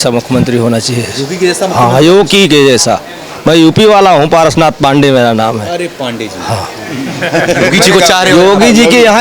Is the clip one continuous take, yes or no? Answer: yes